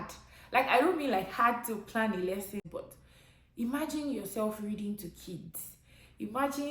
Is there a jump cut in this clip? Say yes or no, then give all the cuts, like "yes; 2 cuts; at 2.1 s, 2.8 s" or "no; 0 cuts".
yes; 1 cut; at 2.7 s